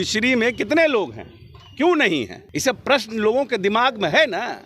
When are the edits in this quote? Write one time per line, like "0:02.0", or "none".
0:02.4